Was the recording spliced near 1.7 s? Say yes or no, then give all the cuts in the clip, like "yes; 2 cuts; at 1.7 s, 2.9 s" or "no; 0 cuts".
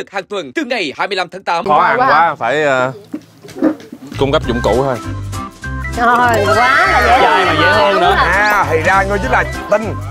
yes; 1 cut; at 1.7 s